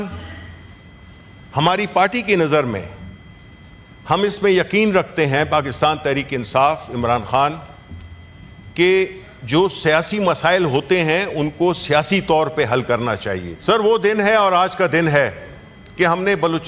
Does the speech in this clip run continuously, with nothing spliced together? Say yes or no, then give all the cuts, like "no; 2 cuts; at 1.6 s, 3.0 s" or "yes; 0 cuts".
no; 1 cut; at 13.5 s